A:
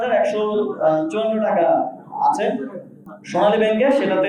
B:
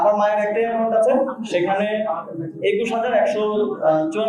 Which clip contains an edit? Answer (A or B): A